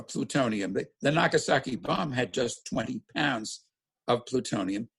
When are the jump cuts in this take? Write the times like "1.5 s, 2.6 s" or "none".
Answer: none